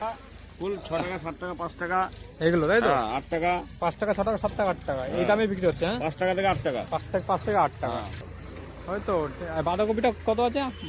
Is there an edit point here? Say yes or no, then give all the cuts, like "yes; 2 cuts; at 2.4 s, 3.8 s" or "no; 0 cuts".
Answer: yes; 1 cut; at 8.3 s